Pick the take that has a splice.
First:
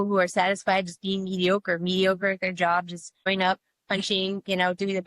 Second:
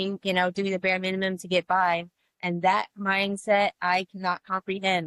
first; 1 cut; at 3.3 s

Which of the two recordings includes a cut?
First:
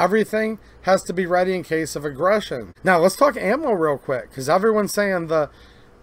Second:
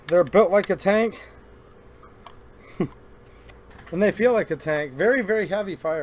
first; 1 cut; at 2.6 s

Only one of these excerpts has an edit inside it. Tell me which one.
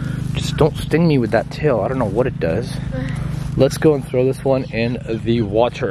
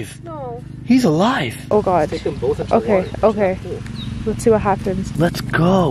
second; 2 cuts; at 1.6 s, 5.1 s

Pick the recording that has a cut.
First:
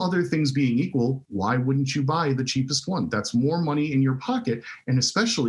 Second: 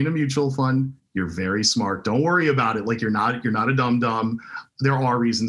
first; 1 cut; at 1.2 s

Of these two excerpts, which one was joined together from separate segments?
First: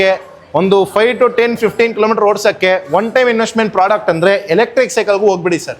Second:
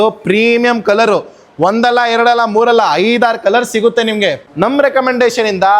second; 1 cut; at 4.4 s

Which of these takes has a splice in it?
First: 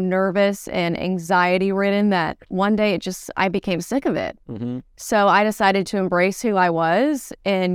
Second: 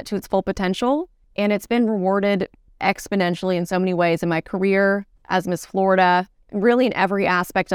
second; 4 cuts; at 1.2 s, 2.6 s, 5.1 s, 6.4 s

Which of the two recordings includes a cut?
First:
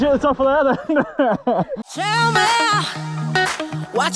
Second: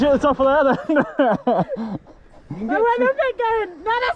first; 1 cut; at 1.9 s

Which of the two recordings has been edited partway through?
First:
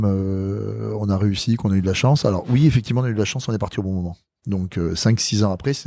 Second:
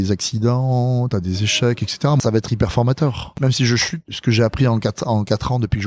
second; 3 cuts; at 2.2 s, 3.3 s, 4.1 s

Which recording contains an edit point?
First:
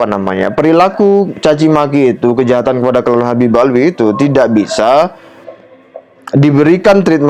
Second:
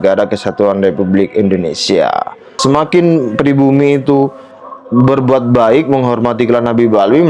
second; 1 cut; at 2.6 s

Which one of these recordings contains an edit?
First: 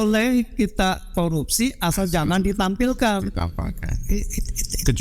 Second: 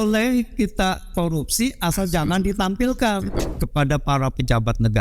second; 1 cut; at 3.4 s

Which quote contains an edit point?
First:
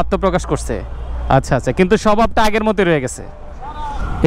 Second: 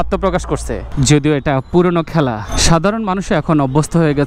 second; 1 cut; at 0.9 s

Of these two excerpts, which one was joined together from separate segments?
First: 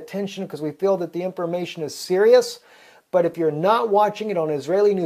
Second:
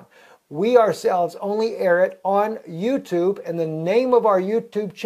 second; 1 cut; at 1.5 s

